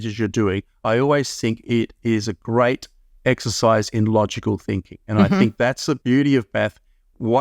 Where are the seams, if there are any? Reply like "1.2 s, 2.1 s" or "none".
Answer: 6.0 s